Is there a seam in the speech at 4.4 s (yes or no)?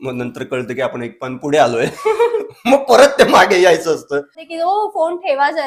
yes